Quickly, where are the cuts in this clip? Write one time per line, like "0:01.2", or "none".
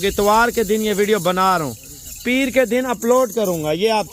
none